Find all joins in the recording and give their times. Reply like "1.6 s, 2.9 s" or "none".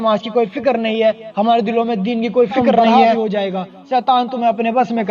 3.0 s